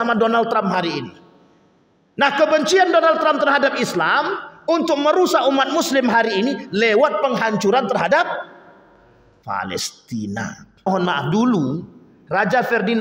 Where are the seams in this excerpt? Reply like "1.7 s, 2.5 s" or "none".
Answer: 10.9 s